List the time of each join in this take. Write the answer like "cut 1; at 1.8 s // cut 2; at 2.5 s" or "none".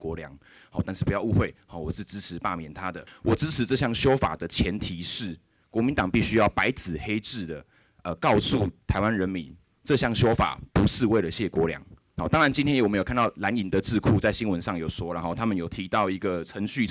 cut 1; at 3.1 s